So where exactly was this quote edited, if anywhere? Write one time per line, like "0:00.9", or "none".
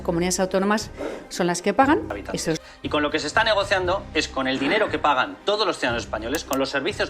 0:02.6